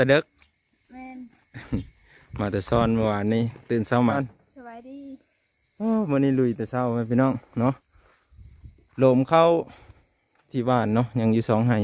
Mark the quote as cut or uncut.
cut